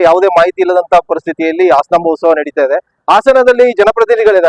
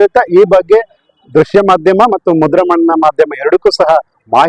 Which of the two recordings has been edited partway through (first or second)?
first